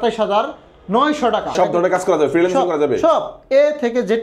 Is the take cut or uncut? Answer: cut